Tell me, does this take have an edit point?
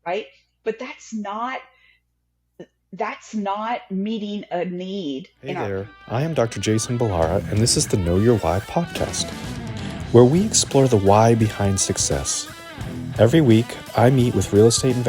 yes; 1 cut; at 5.5 s

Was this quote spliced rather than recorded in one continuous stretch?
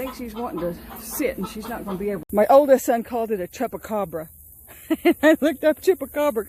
yes; 1 cut; at 2.2 s

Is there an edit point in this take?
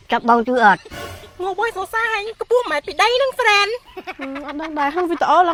no; 0 cuts

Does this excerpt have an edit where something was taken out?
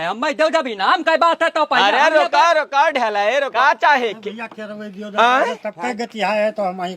yes; 1 cut; at 3.5 s

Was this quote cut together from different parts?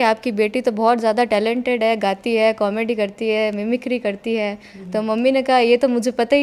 no; 0 cuts

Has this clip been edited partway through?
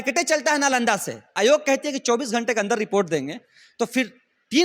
yes; 1 cut; at 1.3 s

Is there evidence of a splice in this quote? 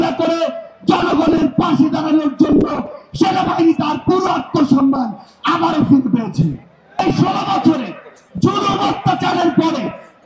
yes; 1 cut; at 7.0 s

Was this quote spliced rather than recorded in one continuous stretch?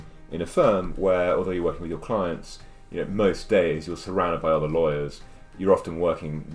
no; 0 cuts

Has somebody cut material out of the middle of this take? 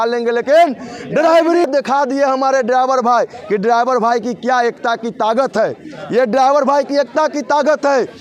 yes; 1 cut; at 1.7 s

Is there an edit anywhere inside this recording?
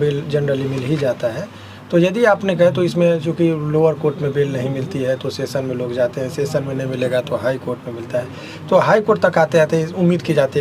no; 0 cuts

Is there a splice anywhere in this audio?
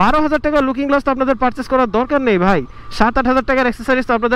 no; 0 cuts

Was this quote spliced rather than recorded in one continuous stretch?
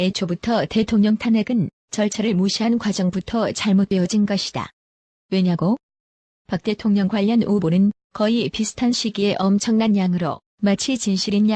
yes; 1 cut; at 10.1 s

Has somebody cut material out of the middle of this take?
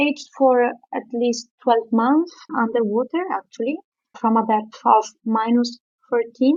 no; 0 cuts

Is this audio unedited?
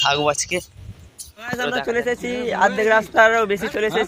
no; 1 cut; at 1.6 s

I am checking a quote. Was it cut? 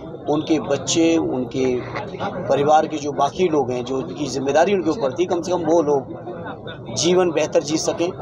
no; 0 cuts

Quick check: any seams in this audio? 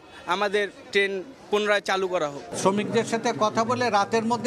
yes; 1 cut; at 2.5 s

